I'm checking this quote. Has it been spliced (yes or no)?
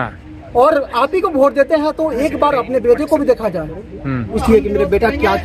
yes